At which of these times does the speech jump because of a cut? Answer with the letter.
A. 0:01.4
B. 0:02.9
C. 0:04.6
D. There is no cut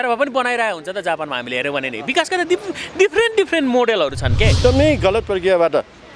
C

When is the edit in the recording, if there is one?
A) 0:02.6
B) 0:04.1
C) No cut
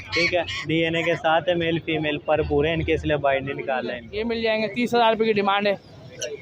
B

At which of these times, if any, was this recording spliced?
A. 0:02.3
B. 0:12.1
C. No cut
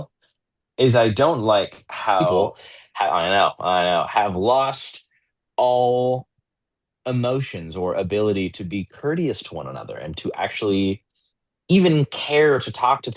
A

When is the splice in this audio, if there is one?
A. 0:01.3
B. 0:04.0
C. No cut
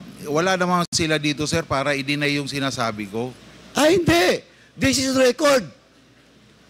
B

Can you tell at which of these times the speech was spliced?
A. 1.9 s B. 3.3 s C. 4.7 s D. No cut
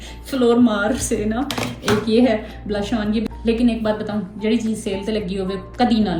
B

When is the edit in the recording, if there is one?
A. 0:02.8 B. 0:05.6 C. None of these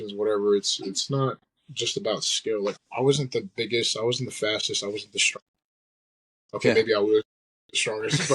A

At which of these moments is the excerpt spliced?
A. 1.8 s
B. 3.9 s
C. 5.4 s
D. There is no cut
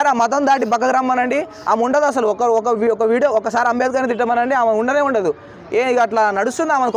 D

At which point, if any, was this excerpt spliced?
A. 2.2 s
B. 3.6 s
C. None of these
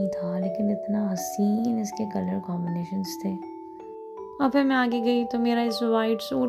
C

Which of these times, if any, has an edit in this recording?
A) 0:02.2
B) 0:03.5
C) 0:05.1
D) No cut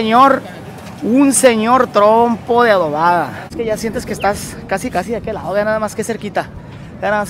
B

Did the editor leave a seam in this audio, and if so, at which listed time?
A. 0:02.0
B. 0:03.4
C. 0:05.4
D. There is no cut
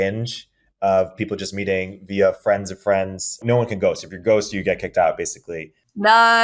B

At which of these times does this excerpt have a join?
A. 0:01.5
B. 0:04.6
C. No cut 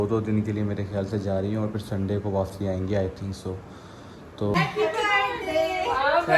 B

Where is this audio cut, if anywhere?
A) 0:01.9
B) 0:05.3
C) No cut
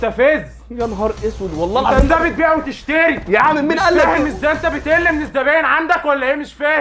C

